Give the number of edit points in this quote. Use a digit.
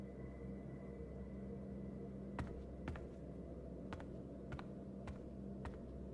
0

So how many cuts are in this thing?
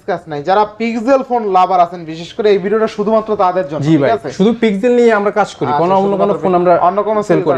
0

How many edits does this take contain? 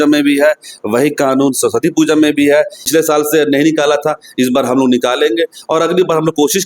1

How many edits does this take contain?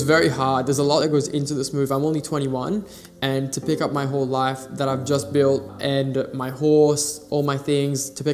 2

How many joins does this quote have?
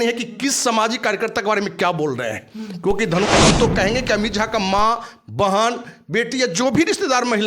1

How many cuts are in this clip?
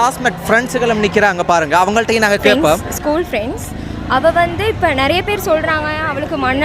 1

